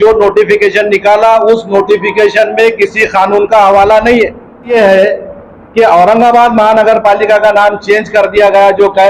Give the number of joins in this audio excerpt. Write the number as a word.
one